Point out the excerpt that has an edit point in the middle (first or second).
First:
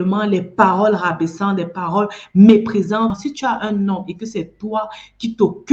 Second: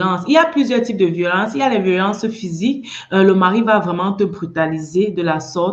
first